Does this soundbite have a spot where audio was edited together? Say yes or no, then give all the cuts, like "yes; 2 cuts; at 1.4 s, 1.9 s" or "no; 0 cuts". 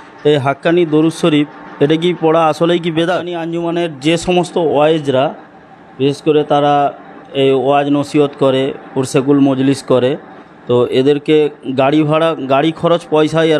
yes; 1 cut; at 3.5 s